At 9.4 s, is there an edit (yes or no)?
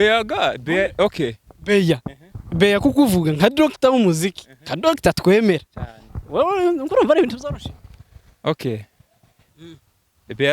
yes